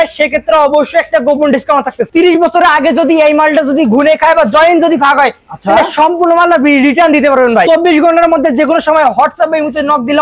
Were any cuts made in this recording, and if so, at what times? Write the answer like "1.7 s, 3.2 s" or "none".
2.1 s, 7.7 s